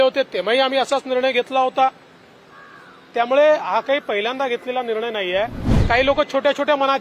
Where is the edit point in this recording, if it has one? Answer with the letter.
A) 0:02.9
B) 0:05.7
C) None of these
B